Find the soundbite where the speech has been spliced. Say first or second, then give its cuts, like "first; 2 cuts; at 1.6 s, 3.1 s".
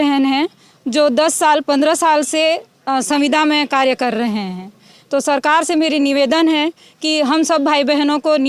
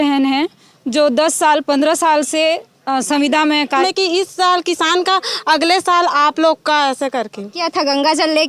second; 2 cuts; at 3.8 s, 7.6 s